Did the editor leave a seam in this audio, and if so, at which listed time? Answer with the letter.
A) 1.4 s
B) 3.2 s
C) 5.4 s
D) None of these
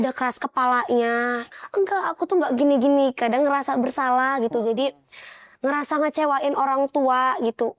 A